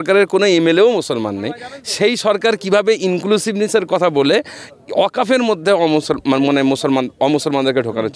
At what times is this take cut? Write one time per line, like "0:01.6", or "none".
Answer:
none